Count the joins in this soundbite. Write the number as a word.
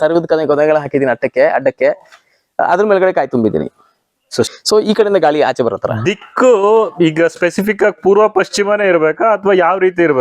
one